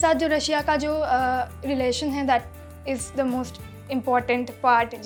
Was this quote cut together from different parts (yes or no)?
no